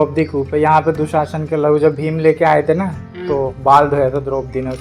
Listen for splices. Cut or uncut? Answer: uncut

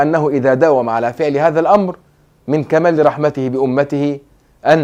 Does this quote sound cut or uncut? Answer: uncut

